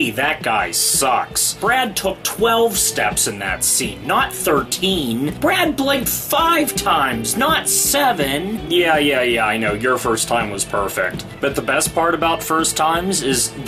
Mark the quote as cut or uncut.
uncut